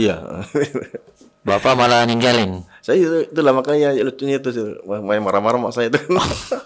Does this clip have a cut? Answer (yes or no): no